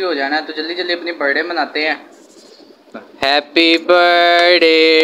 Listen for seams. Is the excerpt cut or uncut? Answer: uncut